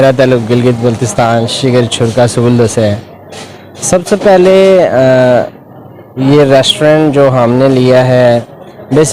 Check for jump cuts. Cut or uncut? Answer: uncut